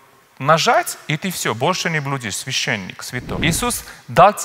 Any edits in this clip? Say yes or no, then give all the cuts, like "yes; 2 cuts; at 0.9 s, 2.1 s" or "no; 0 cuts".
yes; 1 cut; at 3.3 s